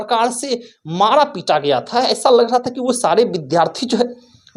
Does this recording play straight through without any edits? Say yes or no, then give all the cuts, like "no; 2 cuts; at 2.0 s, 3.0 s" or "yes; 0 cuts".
yes; 0 cuts